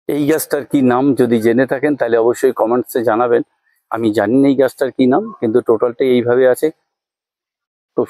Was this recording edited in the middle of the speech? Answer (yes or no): no